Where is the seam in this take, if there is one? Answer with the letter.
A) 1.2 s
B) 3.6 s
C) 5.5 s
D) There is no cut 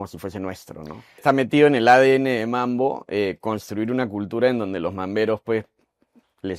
A